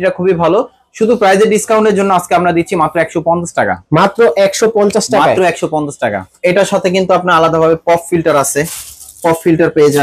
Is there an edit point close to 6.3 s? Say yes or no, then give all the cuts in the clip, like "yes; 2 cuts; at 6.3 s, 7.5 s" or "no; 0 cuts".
yes; 1 cut; at 6.3 s